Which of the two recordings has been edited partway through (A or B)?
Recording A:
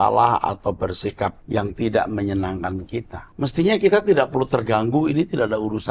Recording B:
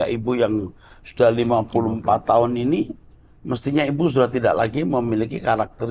A